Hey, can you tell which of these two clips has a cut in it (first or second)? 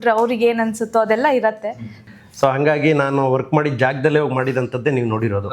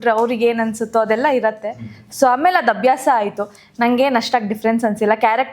first